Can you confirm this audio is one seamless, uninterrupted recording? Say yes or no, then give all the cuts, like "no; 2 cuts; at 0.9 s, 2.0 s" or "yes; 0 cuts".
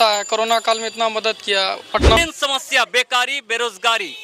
no; 1 cut; at 2.2 s